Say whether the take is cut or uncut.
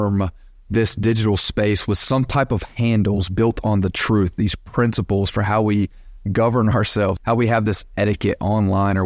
cut